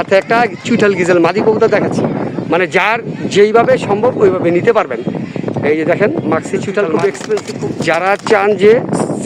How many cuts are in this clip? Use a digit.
1